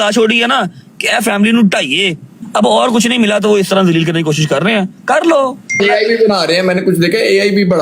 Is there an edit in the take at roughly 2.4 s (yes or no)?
yes